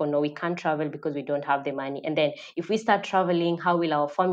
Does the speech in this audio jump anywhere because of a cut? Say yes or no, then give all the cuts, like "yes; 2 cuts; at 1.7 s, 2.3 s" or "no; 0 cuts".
no; 0 cuts